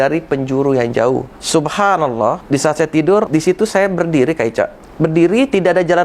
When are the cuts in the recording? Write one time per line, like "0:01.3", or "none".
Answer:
0:01.4
0:02.4
0:03.3
0:04.8